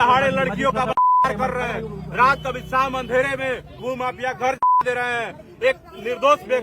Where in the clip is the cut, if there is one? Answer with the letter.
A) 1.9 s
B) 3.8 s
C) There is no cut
B